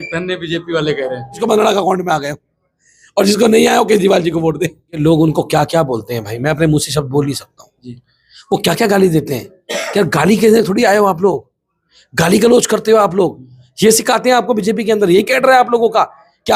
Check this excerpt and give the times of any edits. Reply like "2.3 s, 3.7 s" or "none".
1.4 s, 5.0 s